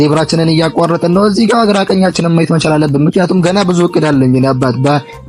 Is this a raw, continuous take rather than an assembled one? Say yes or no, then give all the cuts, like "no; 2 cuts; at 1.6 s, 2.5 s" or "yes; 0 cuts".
yes; 0 cuts